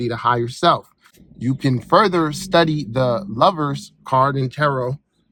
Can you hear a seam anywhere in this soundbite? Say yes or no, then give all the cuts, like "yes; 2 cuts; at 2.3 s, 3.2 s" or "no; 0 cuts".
no; 0 cuts